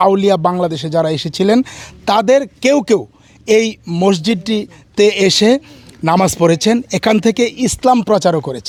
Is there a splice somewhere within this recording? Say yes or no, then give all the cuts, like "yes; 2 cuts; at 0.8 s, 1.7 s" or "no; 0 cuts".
no; 0 cuts